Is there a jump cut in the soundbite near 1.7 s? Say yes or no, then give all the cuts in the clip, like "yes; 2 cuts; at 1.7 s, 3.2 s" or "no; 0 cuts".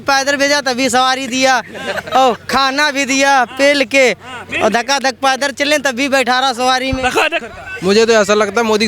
no; 1 cut; at 7.5 s